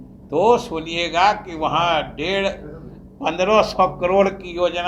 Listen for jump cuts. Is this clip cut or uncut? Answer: uncut